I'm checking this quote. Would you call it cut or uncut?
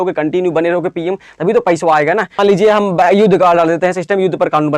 cut